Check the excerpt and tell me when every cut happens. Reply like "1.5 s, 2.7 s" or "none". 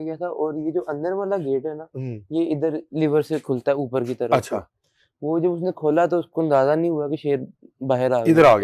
none

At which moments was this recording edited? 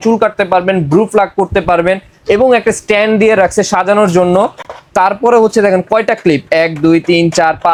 none

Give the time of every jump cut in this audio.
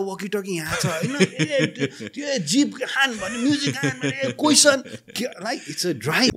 none

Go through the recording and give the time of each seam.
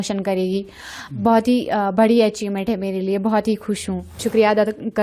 4.1 s

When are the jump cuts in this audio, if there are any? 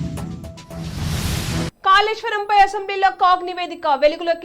1.8 s

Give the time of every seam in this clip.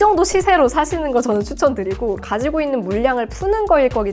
2.2 s

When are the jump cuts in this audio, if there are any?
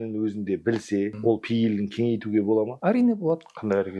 1.2 s, 2.7 s

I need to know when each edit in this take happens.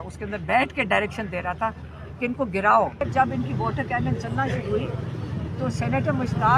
3.0 s

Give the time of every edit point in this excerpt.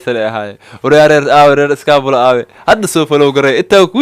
none

